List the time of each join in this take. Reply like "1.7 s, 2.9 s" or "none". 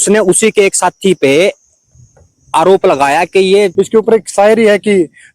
3.7 s